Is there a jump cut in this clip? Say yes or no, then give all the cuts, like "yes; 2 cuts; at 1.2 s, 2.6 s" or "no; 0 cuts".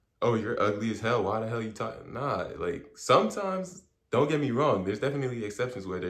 no; 0 cuts